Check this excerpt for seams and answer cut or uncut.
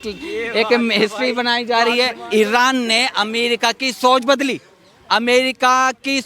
cut